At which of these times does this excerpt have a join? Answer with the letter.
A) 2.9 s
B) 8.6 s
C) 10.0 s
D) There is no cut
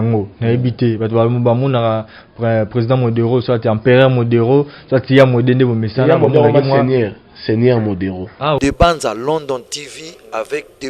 B